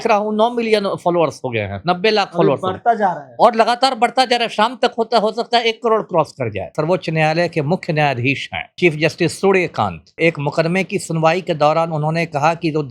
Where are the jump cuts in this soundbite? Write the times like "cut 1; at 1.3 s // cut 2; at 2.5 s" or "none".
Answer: cut 1; at 6.7 s // cut 2; at 8.8 s // cut 3; at 10.2 s